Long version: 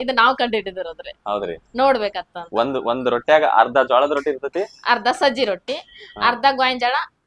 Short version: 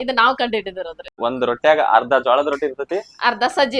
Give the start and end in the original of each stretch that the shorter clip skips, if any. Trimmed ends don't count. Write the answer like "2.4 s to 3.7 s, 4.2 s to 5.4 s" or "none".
1.2 s to 2.8 s